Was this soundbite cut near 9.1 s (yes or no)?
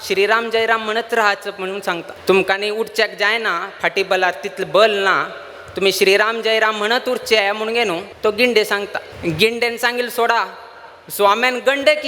yes